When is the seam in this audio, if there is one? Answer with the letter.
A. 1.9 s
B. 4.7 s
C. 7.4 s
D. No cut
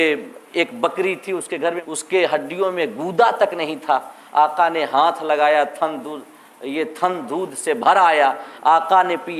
A